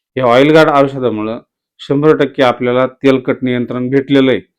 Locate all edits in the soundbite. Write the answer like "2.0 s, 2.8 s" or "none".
none